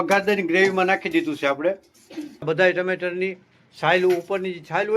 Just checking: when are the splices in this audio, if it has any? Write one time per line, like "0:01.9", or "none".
0:02.4